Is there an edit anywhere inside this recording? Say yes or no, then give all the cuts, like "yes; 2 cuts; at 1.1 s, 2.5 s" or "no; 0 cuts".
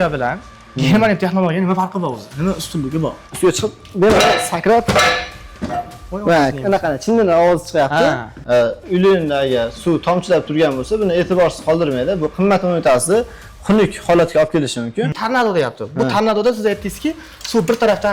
yes; 3 cuts; at 3.2 s, 8.3 s, 15.2 s